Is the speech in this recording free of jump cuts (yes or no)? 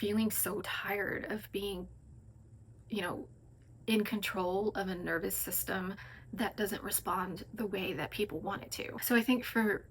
no